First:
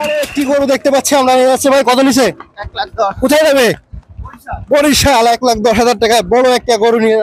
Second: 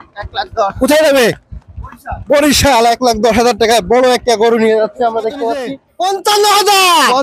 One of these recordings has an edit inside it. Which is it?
second; 1 cut; at 5.8 s

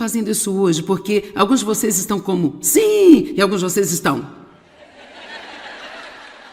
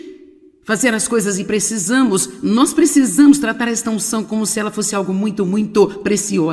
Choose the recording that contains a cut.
first; 1 cut; at 2.6 s

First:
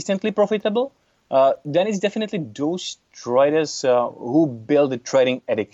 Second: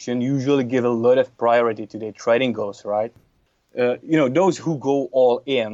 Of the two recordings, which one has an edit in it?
second; 1 cut; at 3.1 s

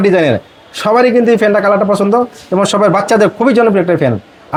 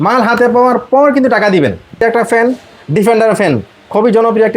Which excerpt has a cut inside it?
second; 1 cut; at 2.0 s

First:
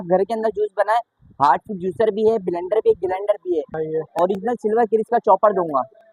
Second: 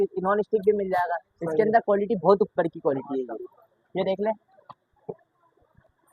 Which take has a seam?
first; 1 cut; at 3.7 s

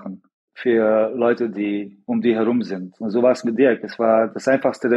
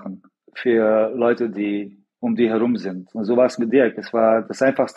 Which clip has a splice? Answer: first; 1 cut; at 1.9 s

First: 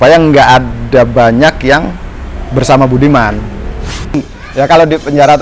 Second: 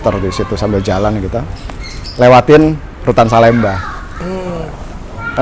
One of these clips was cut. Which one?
first; 1 cut; at 4.1 s

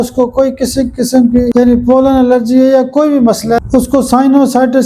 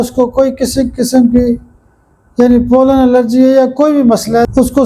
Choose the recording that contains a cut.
first; 1 cut; at 1.5 s

